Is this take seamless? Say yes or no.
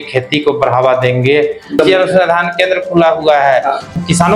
no